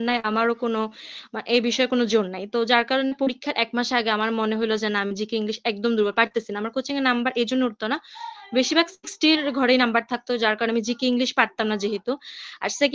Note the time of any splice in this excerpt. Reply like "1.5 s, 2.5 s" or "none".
none